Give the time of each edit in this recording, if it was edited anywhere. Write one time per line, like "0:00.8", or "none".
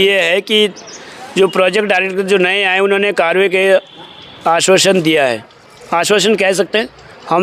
none